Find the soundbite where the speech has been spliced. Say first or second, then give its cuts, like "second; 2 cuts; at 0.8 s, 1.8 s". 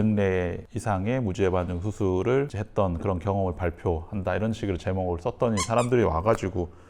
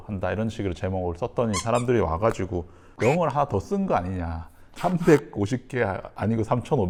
first; 1 cut; at 2.6 s